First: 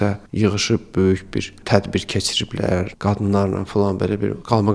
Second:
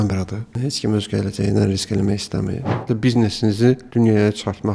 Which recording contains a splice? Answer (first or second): second